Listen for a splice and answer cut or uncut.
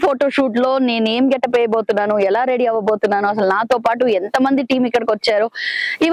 uncut